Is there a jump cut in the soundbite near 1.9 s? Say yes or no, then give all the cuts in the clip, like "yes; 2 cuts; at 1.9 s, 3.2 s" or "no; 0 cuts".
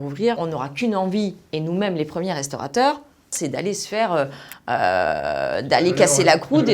no; 1 cut; at 3.3 s